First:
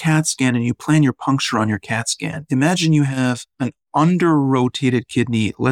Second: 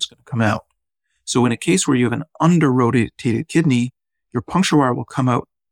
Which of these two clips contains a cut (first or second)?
first